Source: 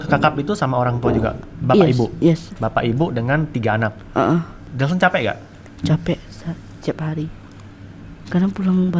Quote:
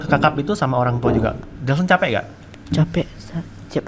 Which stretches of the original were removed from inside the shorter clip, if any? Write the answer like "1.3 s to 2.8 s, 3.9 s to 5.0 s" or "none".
1.5 s to 4.6 s

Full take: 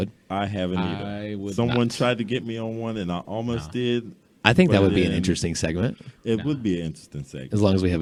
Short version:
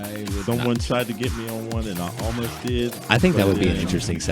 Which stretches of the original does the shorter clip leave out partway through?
4.1 s to 4.3 s

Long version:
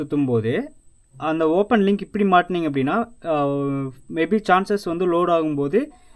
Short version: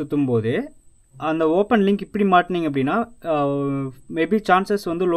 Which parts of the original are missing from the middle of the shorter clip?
none

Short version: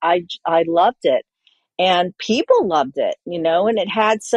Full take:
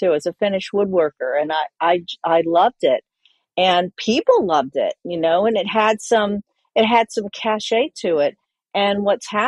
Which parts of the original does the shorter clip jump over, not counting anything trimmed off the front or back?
none

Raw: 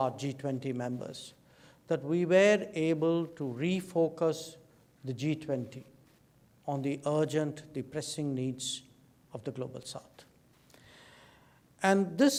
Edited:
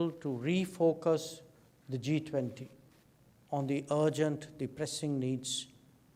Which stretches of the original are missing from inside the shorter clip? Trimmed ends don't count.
none

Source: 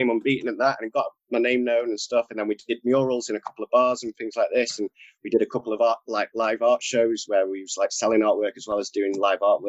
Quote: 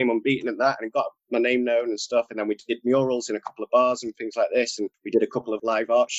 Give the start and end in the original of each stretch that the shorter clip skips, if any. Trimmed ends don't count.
5.3 s to 6.0 s

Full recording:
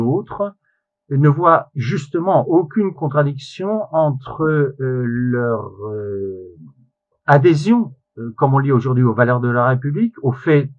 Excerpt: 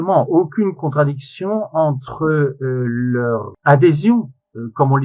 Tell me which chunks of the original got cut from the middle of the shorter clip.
5.7 s to 7.1 s

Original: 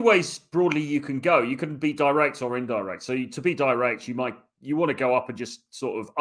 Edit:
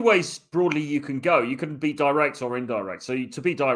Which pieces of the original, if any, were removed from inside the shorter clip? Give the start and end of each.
none

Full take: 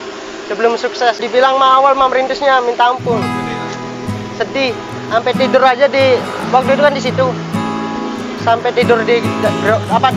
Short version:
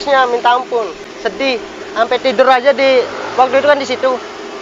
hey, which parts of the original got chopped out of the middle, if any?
3.3 s to 4.1 s

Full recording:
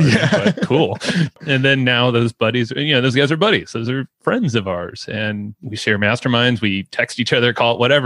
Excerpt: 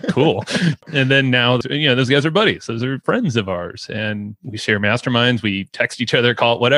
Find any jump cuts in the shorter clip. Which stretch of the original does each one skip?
2.1 s to 2.7 s, 4.0 s to 4.2 s

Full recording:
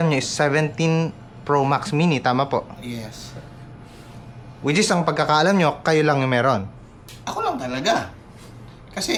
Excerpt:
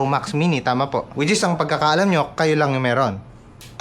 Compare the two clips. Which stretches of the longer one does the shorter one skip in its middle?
2.7 s to 4.6 s

